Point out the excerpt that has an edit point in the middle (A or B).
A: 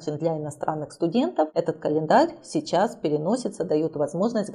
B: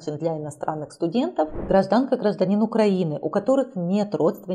B